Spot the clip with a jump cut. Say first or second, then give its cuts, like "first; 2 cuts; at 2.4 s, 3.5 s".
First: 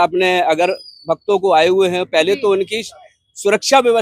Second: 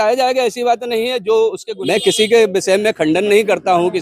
second; 1 cut; at 1.7 s